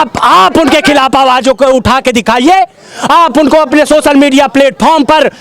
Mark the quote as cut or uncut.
uncut